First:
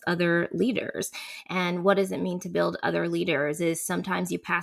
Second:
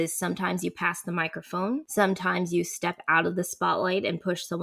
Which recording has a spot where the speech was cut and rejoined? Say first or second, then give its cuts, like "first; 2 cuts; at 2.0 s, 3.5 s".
second; 1 cut; at 1.9 s